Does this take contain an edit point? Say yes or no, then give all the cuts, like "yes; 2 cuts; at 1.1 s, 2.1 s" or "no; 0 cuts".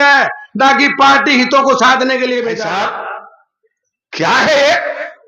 yes; 1 cut; at 2.6 s